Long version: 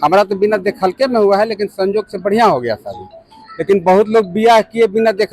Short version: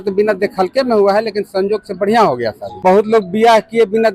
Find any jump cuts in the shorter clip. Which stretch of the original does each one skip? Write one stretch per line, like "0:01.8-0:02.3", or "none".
0:03.0-0:03.8